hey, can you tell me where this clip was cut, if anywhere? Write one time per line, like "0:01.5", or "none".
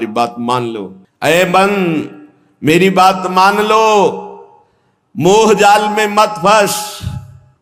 none